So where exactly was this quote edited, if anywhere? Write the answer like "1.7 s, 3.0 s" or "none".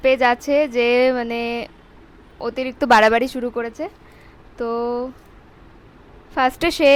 none